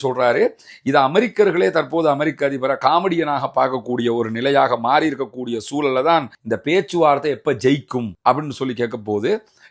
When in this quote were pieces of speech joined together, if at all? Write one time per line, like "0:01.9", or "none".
0:06.4